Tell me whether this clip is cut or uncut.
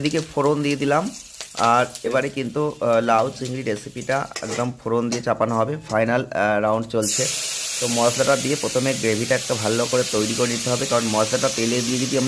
uncut